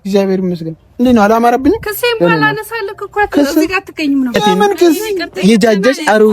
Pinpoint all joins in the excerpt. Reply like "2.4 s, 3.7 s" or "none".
5.0 s